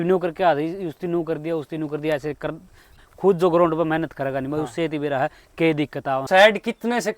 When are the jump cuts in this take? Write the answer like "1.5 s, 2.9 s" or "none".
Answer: 3.0 s, 6.2 s